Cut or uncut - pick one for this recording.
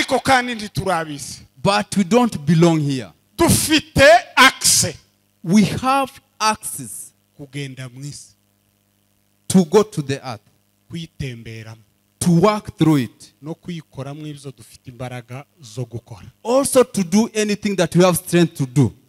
uncut